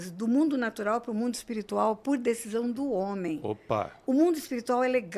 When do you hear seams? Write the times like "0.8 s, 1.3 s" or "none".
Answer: 3.9 s